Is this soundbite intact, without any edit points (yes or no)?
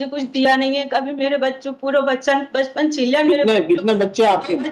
yes